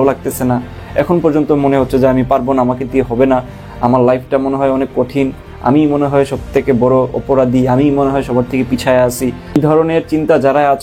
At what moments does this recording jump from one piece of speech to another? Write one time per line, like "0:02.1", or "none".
0:09.6